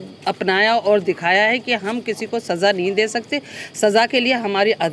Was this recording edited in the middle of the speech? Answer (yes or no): no